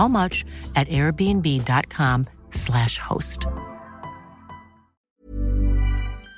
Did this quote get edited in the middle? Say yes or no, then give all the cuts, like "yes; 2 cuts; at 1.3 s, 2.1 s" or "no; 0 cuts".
yes; 1 cut; at 5.1 s